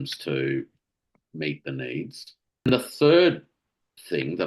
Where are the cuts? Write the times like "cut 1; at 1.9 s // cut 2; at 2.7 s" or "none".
cut 1; at 2.7 s